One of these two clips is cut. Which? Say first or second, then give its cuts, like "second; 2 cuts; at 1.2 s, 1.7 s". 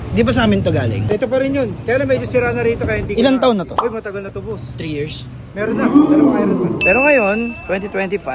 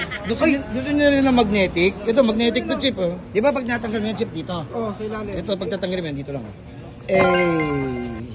first; 4 cuts; at 1.0 s, 3.7 s, 5.7 s, 6.8 s